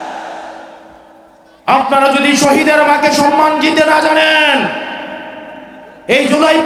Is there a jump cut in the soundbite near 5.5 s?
no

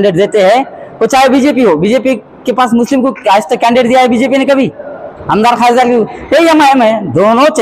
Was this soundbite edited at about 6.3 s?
no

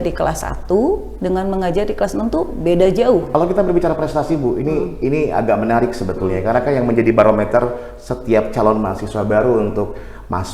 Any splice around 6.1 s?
no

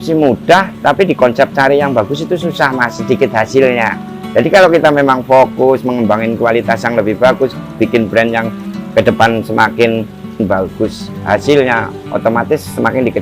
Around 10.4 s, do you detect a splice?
yes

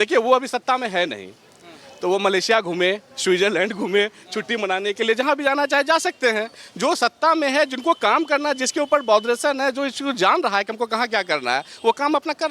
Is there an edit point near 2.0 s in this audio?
no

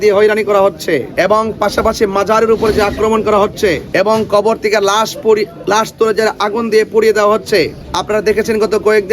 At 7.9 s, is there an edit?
yes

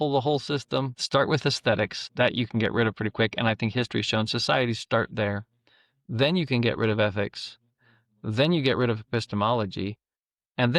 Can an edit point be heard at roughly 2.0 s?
yes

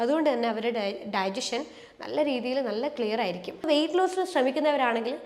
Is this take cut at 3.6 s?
yes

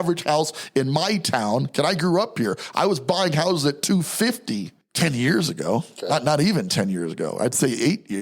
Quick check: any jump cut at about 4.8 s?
yes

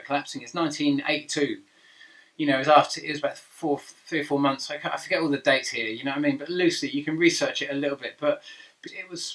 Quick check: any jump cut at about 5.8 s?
yes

